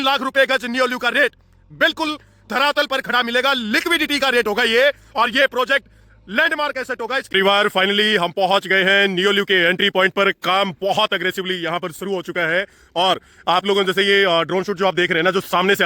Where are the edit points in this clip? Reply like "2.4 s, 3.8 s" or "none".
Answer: 7.2 s